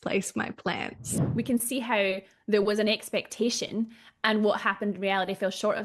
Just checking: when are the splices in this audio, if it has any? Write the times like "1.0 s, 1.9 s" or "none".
1.2 s